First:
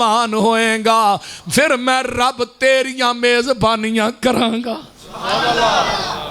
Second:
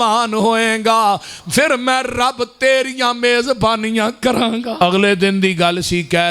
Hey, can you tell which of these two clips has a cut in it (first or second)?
second